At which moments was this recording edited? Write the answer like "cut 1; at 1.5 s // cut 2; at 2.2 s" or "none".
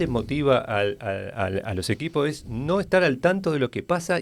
none